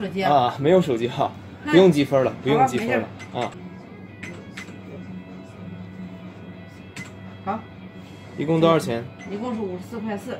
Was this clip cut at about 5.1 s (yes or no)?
no